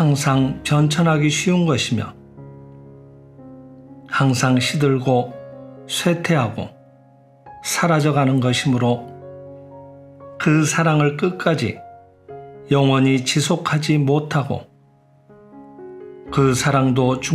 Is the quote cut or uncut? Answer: uncut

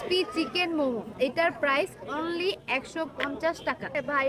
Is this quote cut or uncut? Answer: uncut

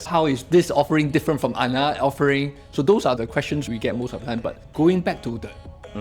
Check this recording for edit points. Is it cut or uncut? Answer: cut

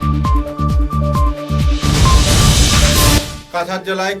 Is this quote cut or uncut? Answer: cut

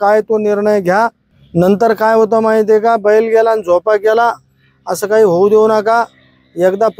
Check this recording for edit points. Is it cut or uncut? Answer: uncut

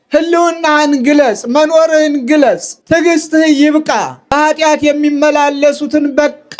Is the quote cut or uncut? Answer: cut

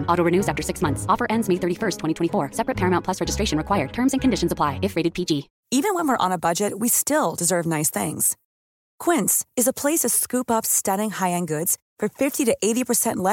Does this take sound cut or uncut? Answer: cut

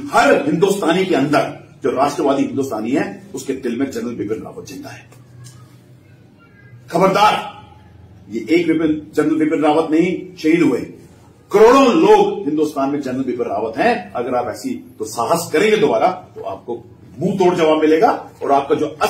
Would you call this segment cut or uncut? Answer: uncut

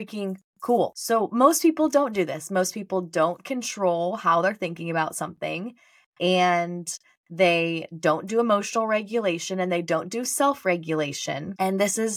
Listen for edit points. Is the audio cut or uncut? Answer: uncut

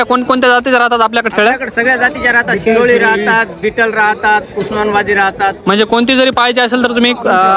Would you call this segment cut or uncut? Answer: uncut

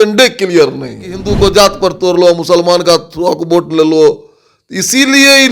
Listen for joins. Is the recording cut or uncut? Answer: cut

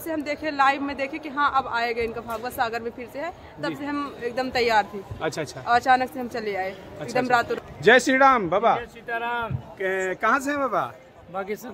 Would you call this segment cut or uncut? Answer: cut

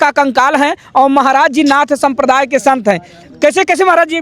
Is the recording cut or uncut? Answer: uncut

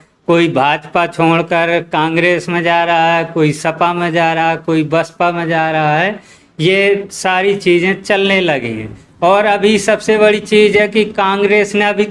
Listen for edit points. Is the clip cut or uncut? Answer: uncut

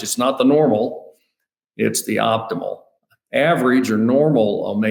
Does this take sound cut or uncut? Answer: uncut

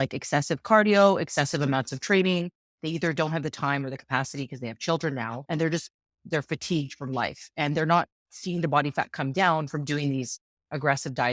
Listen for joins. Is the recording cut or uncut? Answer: uncut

